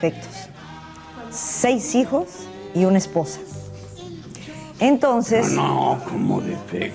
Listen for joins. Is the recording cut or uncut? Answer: uncut